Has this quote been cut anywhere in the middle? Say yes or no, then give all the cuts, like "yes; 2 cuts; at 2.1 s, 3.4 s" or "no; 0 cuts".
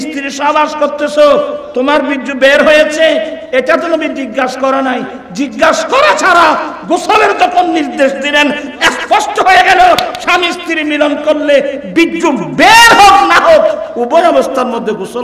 no; 0 cuts